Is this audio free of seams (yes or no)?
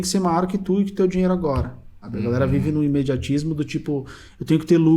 no